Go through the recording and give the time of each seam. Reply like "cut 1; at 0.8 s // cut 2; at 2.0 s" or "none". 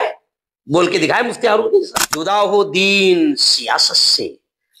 cut 1; at 2.3 s